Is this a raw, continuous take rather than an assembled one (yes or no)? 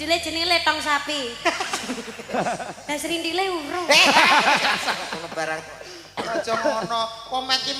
yes